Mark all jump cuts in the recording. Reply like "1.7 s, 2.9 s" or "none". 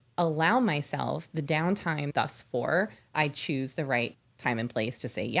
2.1 s, 4.2 s